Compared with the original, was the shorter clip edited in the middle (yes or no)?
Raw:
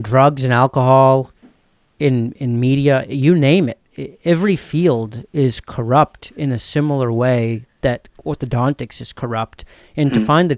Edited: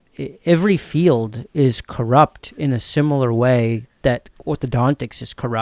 no